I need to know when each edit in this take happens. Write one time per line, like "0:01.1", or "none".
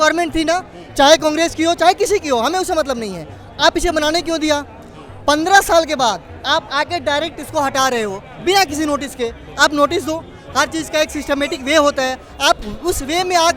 none